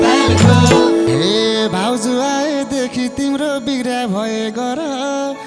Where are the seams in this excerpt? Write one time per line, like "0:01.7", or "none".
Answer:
0:01.1

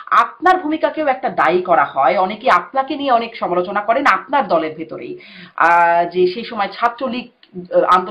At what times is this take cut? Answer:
none

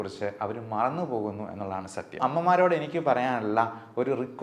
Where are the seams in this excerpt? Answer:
0:02.2

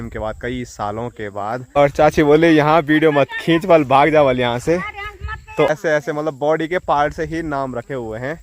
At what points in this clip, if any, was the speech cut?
0:01.8
0:05.7

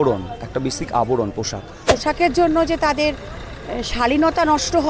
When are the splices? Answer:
0:02.0

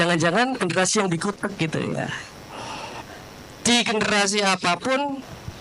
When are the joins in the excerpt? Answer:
0:03.1

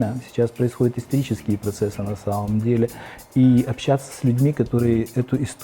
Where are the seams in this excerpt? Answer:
none

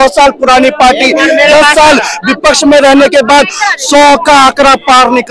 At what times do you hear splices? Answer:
none

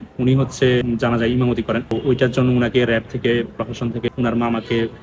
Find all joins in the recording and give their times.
0:00.8
0:02.0
0:04.1

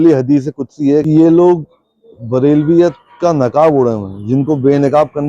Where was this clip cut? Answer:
0:01.0

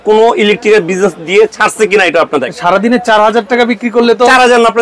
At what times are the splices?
0:02.5

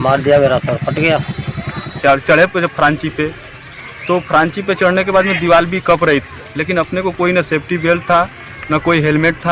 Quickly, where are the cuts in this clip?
0:01.9

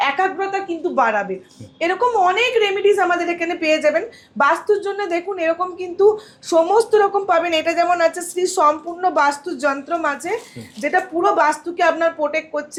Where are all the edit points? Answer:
none

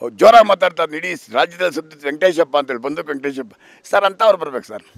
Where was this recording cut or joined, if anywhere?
none

